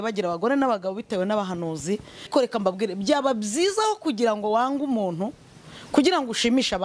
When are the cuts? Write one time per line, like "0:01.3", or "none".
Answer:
0:02.3